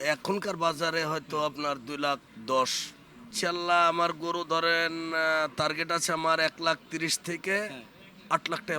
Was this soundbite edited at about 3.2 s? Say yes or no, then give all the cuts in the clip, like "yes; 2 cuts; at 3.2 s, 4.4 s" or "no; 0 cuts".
yes; 2 cuts; at 2.3 s, 3.2 s